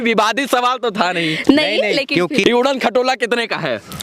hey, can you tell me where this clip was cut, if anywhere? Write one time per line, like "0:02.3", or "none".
0:02.4